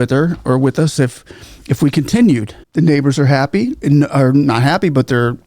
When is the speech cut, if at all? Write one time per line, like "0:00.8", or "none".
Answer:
0:02.6